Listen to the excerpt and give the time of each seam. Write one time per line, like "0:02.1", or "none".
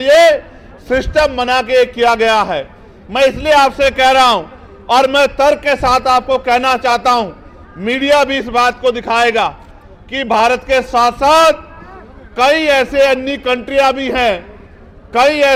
none